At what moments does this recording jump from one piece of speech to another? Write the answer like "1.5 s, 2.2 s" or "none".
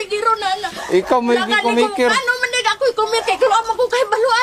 none

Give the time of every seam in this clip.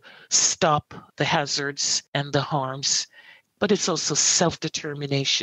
none

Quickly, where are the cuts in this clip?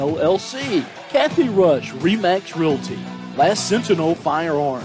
1.0 s

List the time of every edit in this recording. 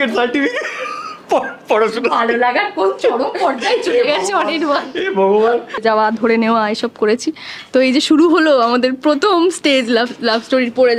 5.8 s

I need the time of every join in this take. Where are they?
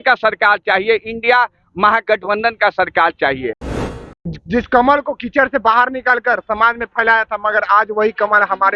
3.6 s

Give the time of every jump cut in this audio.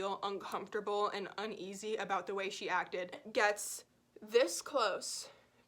3.2 s

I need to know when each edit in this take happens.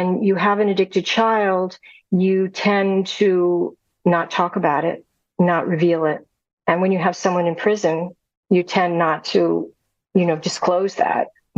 none

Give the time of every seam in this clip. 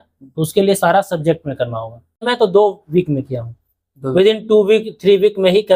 2.2 s

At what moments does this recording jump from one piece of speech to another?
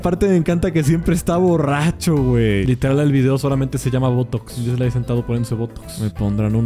2.6 s, 5.8 s

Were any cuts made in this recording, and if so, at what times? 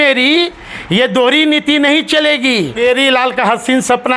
2.8 s

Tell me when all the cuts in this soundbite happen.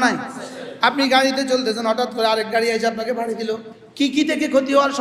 3.8 s

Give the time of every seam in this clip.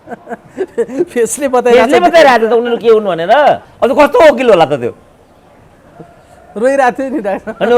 3.7 s

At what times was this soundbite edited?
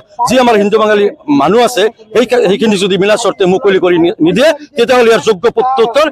none

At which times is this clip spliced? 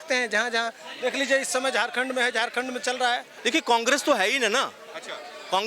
3.3 s

